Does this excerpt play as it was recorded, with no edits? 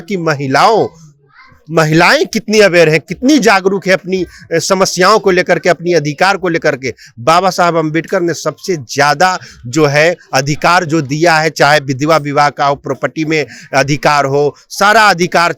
yes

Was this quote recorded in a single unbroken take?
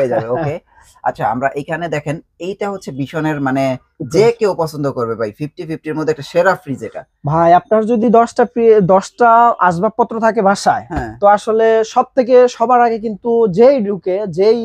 yes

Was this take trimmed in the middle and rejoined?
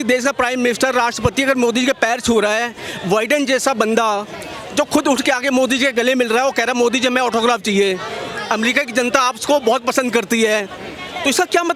no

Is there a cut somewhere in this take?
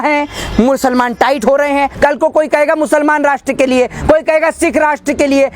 yes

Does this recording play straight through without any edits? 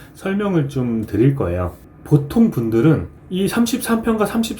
no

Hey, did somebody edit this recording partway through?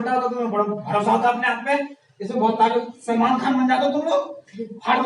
no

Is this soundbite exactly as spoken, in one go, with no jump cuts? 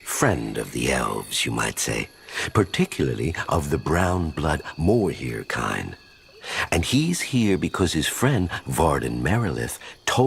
no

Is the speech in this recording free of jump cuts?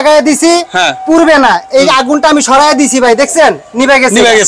yes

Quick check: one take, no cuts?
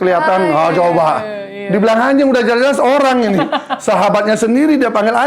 yes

